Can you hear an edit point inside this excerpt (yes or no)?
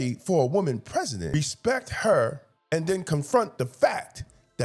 yes